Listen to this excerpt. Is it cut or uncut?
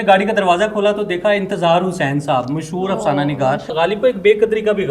cut